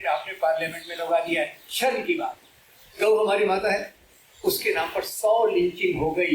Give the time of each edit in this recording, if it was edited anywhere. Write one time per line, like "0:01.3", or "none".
0:02.9